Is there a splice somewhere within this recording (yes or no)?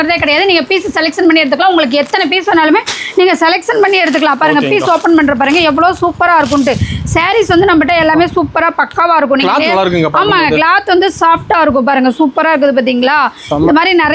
no